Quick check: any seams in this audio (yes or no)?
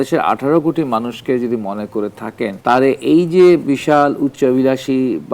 yes